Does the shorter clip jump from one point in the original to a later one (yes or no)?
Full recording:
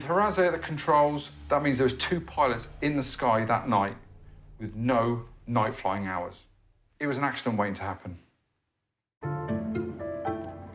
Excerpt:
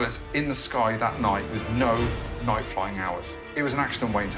yes